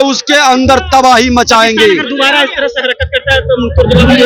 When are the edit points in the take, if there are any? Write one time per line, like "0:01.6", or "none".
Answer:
none